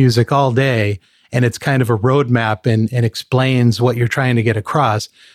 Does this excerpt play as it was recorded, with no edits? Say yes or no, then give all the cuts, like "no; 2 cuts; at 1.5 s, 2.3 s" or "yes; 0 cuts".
yes; 0 cuts